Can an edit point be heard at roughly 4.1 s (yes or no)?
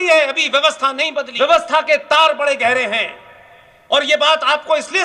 no